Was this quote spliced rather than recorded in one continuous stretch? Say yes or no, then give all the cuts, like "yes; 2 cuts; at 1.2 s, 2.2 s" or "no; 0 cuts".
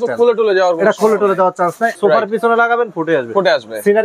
yes; 1 cut; at 1.9 s